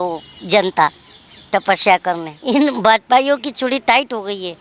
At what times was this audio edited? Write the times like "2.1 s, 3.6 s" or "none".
2.3 s